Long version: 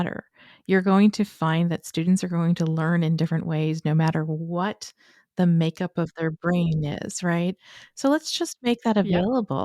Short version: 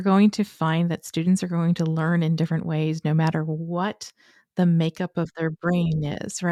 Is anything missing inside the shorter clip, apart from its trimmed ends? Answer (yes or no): no